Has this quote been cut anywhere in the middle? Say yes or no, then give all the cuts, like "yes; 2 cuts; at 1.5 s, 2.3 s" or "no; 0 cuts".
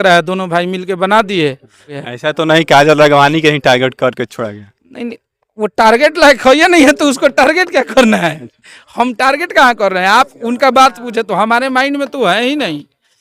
yes; 1 cut; at 2.0 s